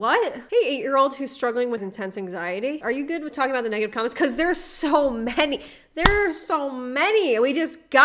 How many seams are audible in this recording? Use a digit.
1